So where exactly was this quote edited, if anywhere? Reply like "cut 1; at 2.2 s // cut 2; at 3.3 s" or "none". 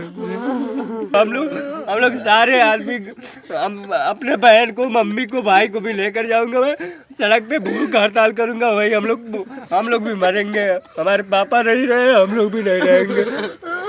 cut 1; at 1.1 s